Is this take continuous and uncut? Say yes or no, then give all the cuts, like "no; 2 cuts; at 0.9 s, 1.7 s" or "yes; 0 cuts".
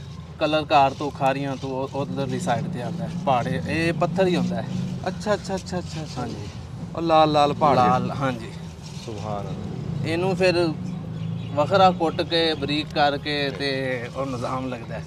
yes; 0 cuts